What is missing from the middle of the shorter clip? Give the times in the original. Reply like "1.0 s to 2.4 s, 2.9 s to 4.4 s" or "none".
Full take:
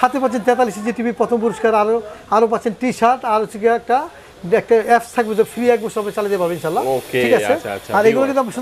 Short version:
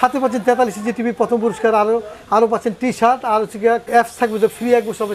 3.9 s to 4.8 s